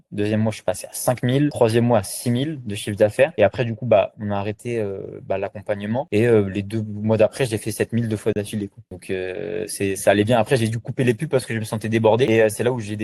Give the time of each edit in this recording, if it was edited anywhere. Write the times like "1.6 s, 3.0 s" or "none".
none